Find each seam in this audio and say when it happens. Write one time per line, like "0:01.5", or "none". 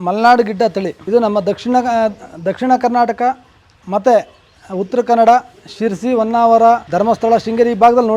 0:01.0
0:06.9